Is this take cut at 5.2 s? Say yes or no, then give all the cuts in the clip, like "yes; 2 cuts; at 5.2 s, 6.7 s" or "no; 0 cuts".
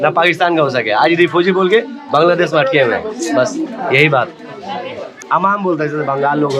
yes; 1 cut; at 5.2 s